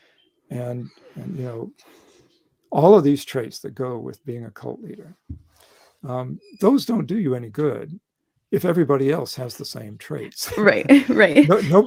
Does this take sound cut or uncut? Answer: uncut